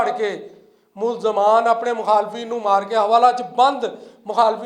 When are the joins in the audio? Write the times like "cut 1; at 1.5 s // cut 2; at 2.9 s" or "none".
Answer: none